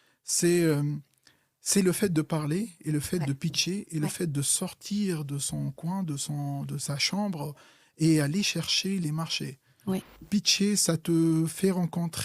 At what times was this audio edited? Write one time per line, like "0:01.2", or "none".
0:10.3